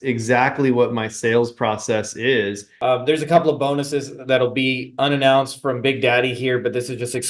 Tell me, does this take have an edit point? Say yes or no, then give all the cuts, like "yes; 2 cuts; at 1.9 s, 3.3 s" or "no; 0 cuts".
yes; 1 cut; at 2.6 s